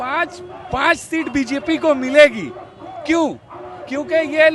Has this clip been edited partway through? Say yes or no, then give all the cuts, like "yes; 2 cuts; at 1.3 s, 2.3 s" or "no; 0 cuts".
no; 0 cuts